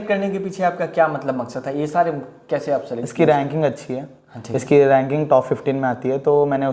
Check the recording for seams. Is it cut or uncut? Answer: uncut